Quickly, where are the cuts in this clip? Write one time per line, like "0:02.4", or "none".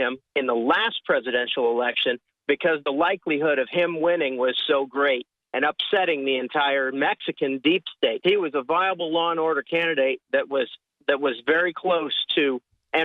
0:08.2